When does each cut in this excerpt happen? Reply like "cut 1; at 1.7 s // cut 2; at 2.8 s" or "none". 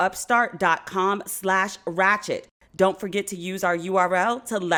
none